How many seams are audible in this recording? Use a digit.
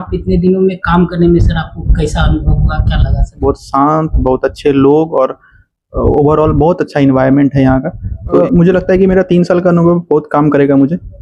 2